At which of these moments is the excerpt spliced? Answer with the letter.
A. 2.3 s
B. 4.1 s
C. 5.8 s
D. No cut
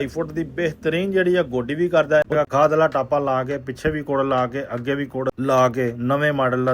A